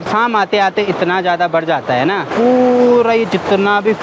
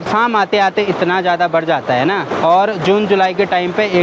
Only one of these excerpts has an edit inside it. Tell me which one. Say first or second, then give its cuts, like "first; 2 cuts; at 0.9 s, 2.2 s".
first; 1 cut; at 2.3 s